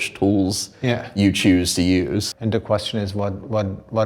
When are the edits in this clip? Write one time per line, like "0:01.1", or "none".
0:02.3